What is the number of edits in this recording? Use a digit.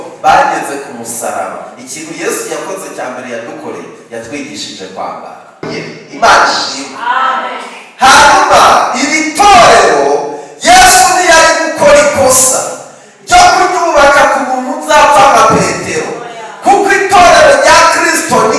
1